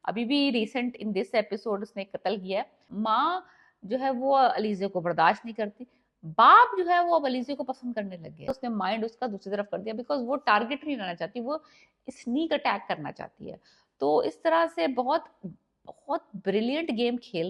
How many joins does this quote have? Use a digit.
2